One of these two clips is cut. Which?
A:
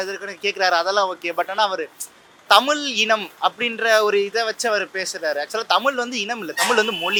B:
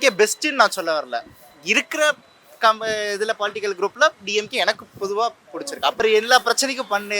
B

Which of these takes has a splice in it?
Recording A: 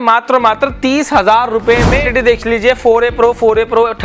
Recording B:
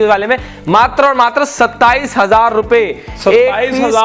A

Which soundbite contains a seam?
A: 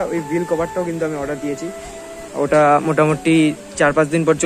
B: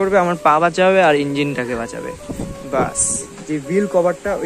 B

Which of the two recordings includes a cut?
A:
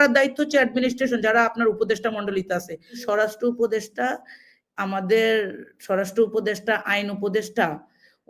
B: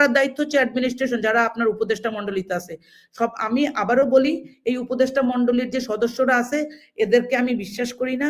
A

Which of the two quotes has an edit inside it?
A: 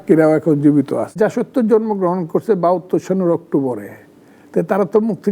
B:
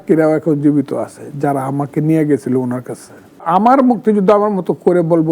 A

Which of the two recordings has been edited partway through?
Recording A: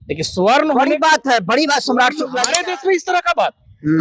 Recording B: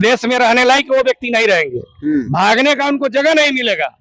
A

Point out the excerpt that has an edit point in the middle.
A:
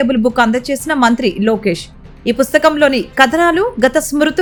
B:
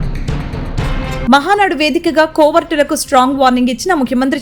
B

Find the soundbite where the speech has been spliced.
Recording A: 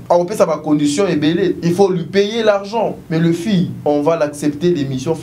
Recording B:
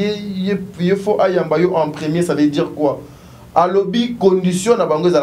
A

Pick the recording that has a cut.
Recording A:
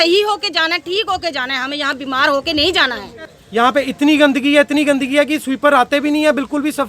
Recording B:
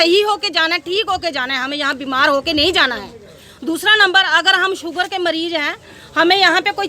A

